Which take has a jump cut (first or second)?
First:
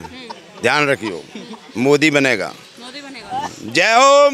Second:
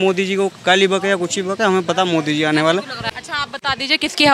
second